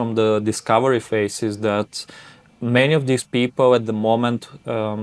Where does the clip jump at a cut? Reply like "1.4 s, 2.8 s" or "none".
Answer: none